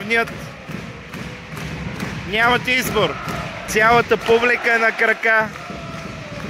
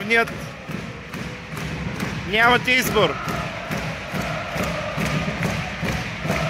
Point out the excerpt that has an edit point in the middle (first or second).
first